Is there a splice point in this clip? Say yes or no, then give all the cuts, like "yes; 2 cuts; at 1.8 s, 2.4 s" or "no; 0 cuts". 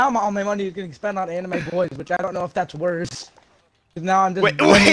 no; 0 cuts